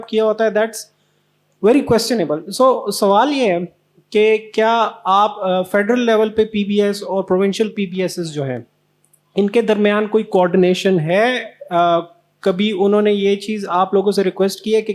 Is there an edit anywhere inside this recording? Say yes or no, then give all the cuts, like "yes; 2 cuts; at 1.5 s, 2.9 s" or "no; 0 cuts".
no; 0 cuts